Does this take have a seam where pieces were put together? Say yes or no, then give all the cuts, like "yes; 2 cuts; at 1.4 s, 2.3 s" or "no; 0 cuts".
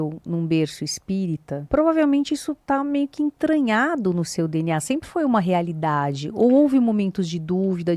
yes; 1 cut; at 1.5 s